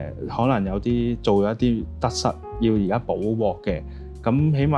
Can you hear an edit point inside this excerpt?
no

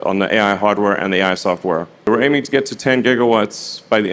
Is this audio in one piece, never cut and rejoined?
no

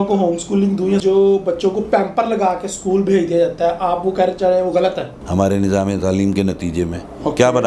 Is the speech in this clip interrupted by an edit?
yes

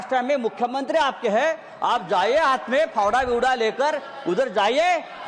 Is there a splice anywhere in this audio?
no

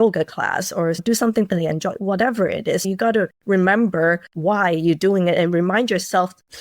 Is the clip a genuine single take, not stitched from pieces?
no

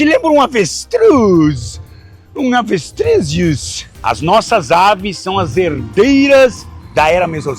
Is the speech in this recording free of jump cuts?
no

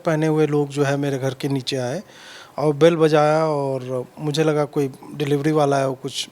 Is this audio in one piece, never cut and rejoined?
yes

